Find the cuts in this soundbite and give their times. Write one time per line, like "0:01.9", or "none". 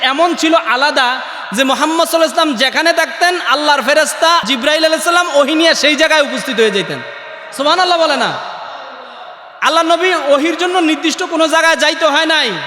0:04.5